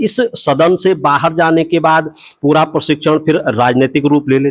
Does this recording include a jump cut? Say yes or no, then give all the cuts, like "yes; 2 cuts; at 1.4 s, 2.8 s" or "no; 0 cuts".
no; 0 cuts